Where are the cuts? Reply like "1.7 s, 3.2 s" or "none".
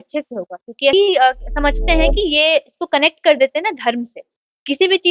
0.9 s